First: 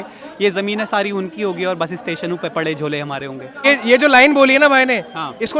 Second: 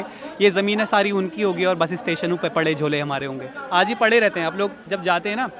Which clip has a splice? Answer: first; 1 cut; at 3.6 s

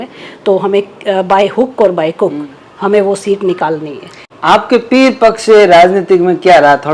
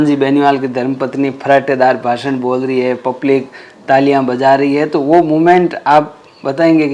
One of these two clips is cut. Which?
first; 1 cut; at 4.2 s

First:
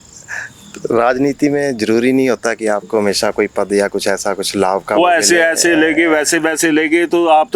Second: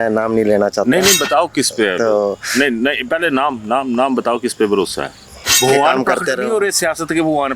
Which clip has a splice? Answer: second; 1 cut; at 5.6 s

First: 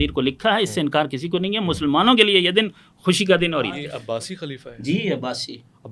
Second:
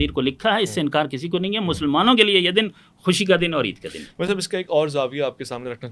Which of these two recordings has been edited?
first; 1 cut; at 3.9 s

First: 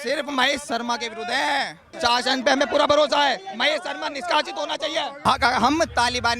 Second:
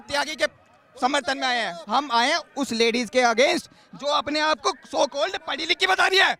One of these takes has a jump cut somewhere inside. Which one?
first; 2 cuts; at 1.9 s, 5.2 s

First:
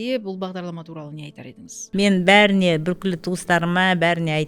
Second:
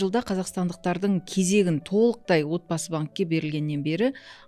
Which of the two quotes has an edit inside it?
first; 1 cut; at 1.8 s

